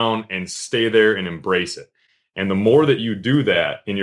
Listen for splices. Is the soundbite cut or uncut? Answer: uncut